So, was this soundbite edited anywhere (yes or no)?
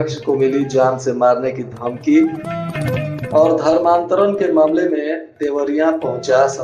no